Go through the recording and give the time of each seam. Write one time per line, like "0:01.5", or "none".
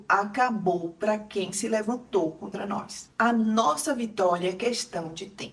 none